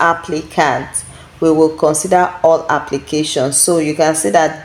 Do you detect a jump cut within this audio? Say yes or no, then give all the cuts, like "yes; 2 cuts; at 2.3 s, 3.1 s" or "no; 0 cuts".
no; 0 cuts